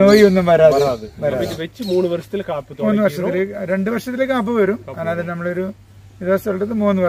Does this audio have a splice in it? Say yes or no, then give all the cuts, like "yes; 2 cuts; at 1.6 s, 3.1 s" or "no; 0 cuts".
yes; 1 cut; at 1.4 s